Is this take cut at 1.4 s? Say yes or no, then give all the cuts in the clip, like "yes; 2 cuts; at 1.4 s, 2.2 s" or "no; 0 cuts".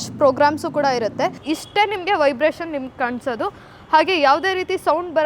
yes; 1 cut; at 1.4 s